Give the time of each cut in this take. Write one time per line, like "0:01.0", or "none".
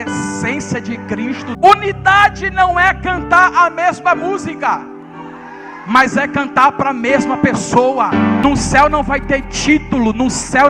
0:01.6
0:08.4